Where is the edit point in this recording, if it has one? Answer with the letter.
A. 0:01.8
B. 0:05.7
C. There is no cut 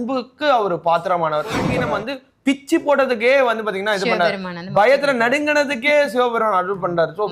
A